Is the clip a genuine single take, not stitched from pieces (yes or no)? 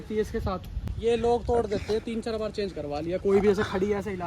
no